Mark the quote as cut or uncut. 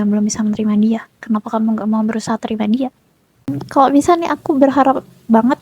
cut